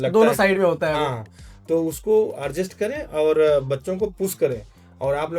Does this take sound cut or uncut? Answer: uncut